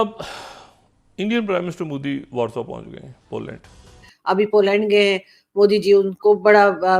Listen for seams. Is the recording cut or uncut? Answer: cut